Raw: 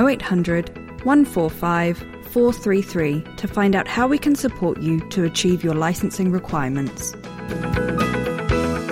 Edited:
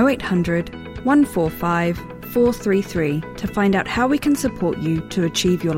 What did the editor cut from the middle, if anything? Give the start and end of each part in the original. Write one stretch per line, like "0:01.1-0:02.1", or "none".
none